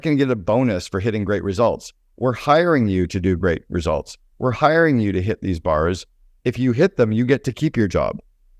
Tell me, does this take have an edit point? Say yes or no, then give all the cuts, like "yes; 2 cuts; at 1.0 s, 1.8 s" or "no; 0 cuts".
no; 0 cuts